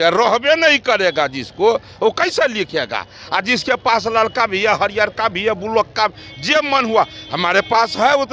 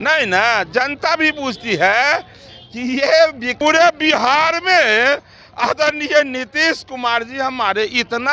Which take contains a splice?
second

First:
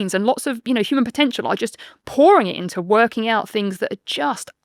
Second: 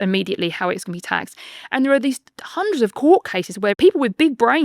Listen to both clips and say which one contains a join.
second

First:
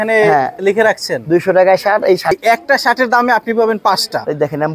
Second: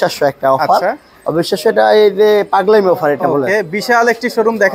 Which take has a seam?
first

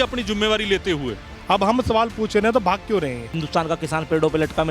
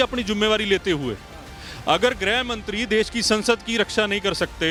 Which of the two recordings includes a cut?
first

